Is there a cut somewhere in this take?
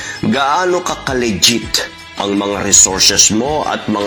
no; 0 cuts

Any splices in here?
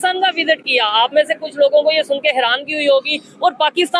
no; 0 cuts

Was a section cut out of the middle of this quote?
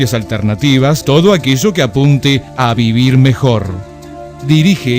yes; 1 cut; at 1.0 s

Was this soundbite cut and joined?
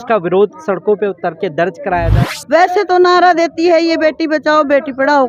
yes; 1 cut; at 2.1 s

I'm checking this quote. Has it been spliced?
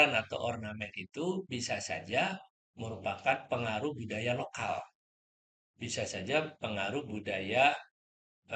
no; 0 cuts

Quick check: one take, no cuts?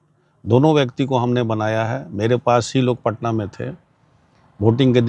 yes; 0 cuts

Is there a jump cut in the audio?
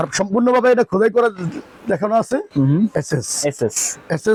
no; 0 cuts

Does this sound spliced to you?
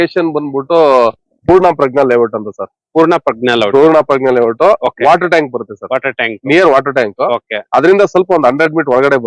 no; 0 cuts

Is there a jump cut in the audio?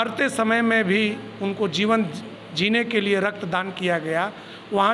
no; 0 cuts

